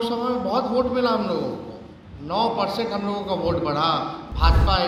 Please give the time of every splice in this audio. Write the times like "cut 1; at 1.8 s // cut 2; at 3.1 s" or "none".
none